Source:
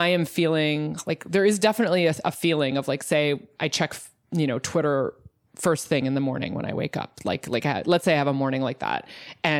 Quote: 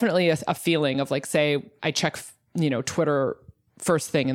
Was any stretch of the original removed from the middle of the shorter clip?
no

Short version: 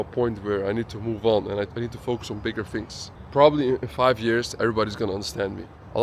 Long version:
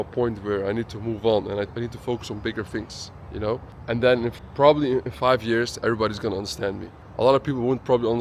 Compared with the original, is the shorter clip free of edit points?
no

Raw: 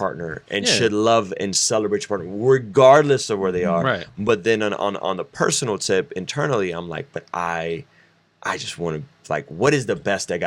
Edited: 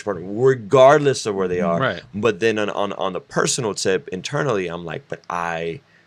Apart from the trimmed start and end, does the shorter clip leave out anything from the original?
no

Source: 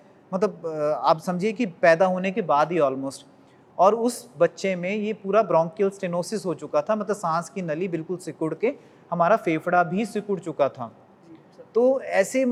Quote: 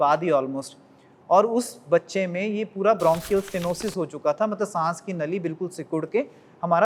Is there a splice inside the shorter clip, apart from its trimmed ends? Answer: no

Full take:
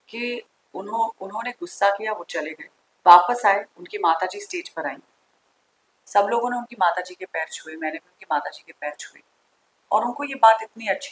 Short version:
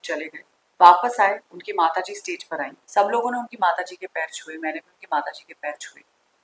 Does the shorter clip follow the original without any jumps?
no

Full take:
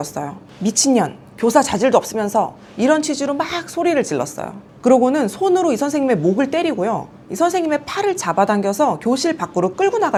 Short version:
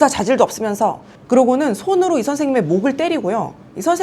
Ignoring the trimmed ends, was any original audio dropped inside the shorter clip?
yes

